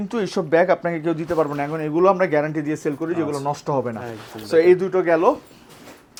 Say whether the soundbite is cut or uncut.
uncut